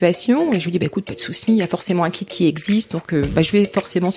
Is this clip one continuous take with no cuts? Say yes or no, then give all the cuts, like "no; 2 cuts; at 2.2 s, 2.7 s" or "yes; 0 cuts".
yes; 0 cuts